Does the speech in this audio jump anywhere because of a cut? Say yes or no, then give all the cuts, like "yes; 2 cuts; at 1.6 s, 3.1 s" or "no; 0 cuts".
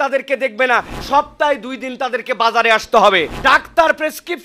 yes; 2 cuts; at 0.9 s, 3.3 s